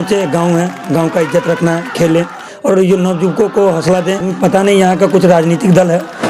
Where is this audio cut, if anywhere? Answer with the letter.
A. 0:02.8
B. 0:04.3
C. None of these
B